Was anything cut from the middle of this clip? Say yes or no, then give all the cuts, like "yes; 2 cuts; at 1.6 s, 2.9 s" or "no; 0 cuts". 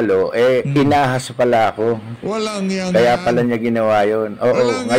no; 0 cuts